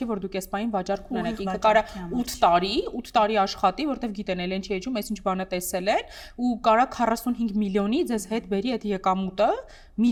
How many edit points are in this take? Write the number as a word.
zero